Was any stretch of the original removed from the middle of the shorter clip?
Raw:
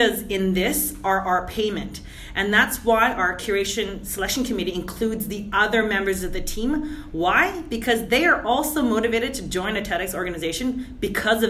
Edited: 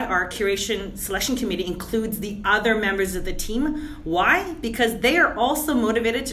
no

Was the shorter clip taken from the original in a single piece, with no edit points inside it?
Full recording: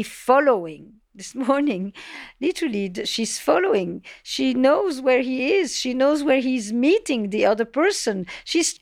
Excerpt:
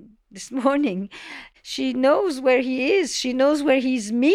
no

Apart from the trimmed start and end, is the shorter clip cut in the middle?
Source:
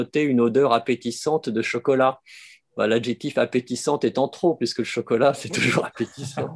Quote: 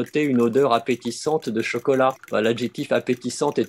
yes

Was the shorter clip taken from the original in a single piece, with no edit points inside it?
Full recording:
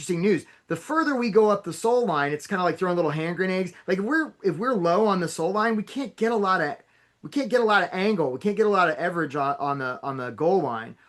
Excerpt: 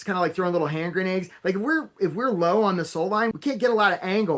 no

